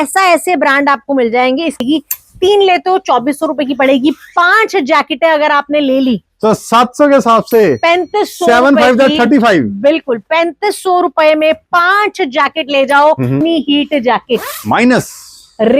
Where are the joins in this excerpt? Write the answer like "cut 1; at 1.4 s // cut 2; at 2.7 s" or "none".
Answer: cut 1; at 1.8 s // cut 2; at 13.4 s